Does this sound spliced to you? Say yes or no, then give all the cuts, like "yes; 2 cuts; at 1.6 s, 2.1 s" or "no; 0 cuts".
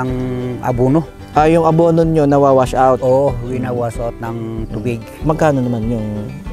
yes; 1 cut; at 5.2 s